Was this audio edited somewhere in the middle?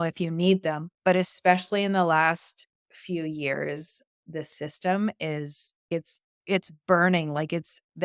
yes; 3 cuts; at 0.9 s, 4.2 s, 5.9 s

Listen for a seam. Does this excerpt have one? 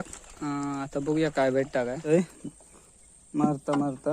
yes; 1 cut; at 2.1 s

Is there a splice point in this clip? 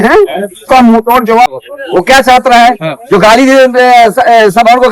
yes; 1 cut; at 1.5 s

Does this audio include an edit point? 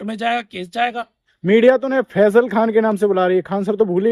no; 0 cuts

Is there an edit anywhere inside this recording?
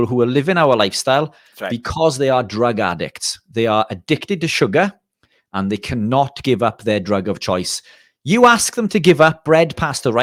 no; 0 cuts

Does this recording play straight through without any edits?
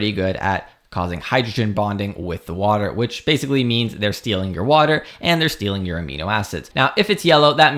no; 1 cut; at 6.6 s

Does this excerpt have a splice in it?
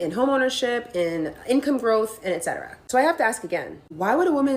yes; 1 cut; at 3.1 s

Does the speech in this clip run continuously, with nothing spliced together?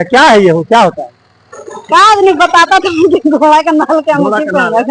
yes; 0 cuts

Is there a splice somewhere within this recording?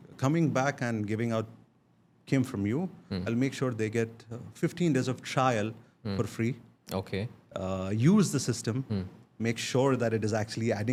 no; 0 cuts

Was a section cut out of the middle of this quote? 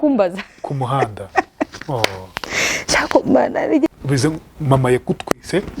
yes; 1 cut; at 3.9 s

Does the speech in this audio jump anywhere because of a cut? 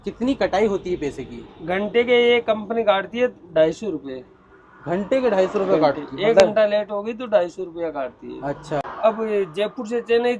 no; 0 cuts

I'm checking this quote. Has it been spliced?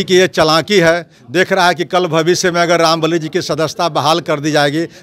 no; 0 cuts

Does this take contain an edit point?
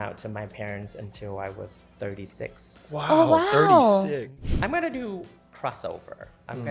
yes; 1 cut; at 4.3 s

